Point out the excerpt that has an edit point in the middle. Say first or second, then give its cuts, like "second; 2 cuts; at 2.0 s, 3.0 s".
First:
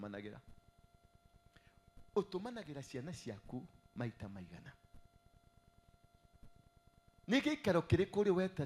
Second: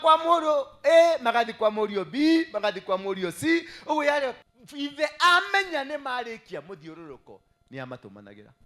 second; 1 cut; at 4.4 s